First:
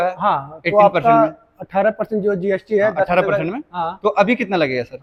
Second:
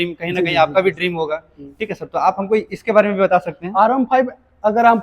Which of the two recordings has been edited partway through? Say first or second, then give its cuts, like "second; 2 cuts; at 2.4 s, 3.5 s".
second; 1 cut; at 1.5 s